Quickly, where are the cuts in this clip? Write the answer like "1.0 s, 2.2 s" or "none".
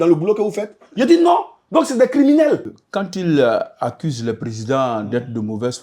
2.8 s

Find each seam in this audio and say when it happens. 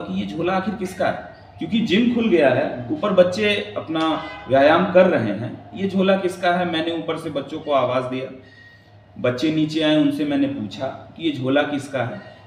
none

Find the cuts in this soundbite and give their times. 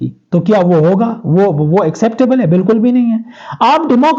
none

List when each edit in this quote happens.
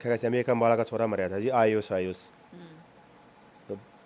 none

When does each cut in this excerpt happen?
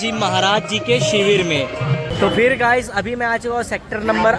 2.0 s

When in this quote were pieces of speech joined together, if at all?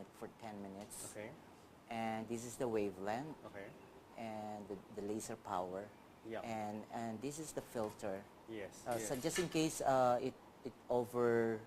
10.0 s

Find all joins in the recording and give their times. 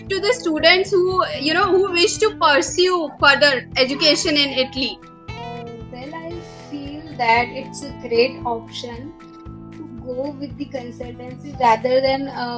none

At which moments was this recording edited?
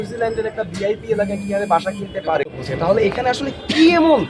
2.4 s

